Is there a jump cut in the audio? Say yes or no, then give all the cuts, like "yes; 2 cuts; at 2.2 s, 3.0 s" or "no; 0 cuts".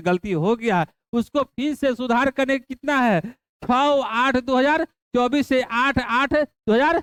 no; 0 cuts